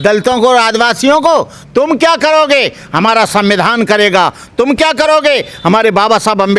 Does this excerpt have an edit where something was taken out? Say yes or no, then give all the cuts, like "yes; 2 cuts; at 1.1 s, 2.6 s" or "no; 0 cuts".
no; 0 cuts